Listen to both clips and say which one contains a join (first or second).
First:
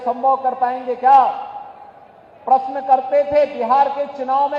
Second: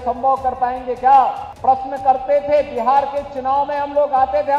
second